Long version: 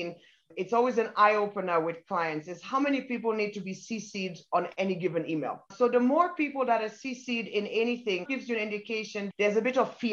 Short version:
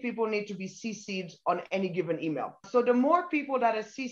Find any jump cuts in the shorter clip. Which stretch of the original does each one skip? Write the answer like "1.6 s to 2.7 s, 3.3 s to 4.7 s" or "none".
none

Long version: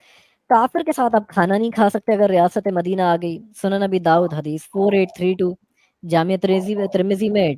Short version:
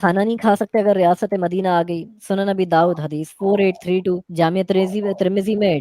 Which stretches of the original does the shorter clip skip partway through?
5.6 s to 6.0 s

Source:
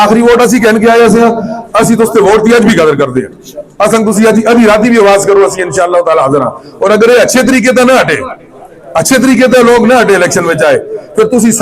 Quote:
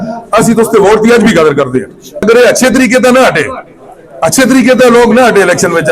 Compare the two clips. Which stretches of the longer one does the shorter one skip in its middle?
3.7 s to 7.0 s

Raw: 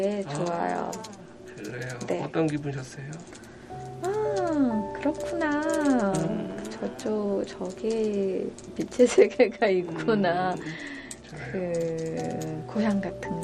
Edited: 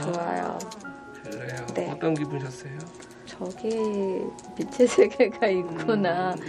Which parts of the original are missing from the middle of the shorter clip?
3.7 s to 7.5 s

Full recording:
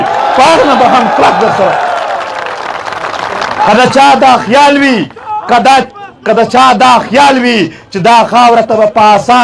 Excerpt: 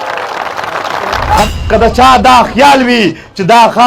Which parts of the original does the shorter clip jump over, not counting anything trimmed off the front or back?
3.7 s to 6.0 s

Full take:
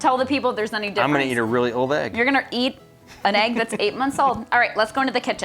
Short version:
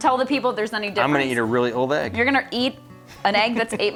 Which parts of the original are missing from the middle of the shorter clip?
none

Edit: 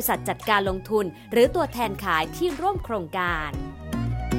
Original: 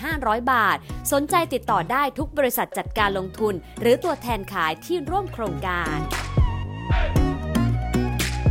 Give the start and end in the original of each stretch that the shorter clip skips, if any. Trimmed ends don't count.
5.8 s to 7.0 s

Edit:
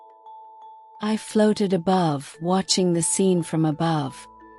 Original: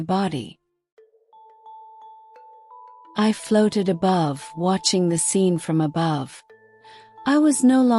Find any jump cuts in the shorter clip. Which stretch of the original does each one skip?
2.4 s to 3.2 s

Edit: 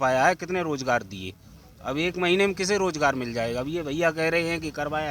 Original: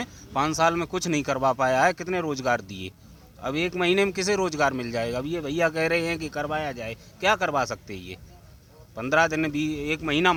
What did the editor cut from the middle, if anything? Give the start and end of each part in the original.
none

